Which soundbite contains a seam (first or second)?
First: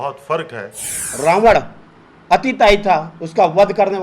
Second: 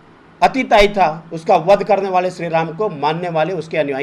first